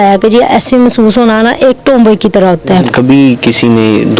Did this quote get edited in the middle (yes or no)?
yes